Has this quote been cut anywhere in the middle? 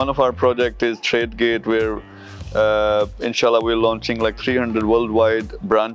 no; 0 cuts

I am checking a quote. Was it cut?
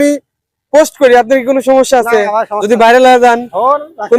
no; 0 cuts

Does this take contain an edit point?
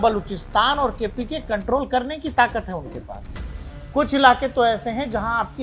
no; 0 cuts

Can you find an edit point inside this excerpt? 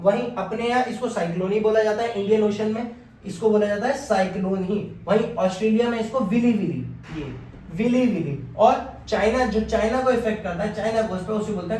no; 0 cuts

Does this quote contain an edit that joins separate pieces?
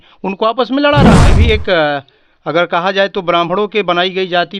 yes; 1 cut; at 1.3 s

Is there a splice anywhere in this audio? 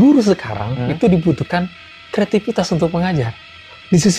no; 0 cuts

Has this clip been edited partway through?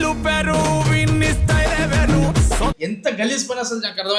yes; 1 cut; at 2.8 s

